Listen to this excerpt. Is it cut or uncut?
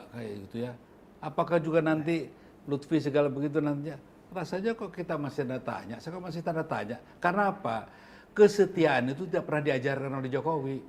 uncut